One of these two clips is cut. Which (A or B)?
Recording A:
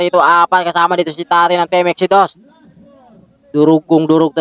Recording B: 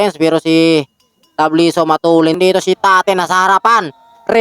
B